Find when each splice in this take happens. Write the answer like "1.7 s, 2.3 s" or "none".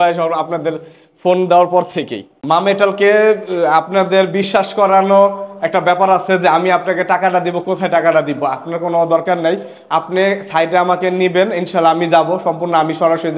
2.3 s